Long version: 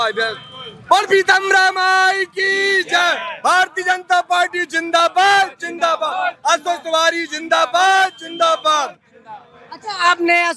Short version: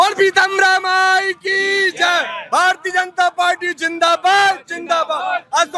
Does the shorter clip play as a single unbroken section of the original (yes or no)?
yes